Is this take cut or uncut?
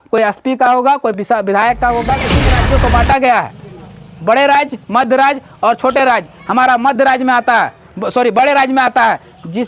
cut